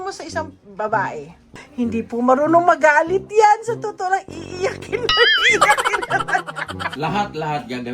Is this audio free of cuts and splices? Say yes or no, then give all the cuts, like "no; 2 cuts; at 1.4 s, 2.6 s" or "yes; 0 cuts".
no; 2 cuts; at 1.6 s, 6.9 s